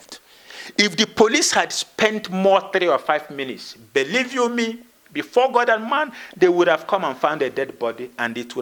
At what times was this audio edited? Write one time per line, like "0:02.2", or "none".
none